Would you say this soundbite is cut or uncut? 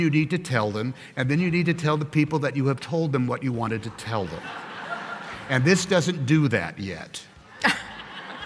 uncut